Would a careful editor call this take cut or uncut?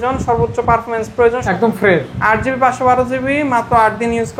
cut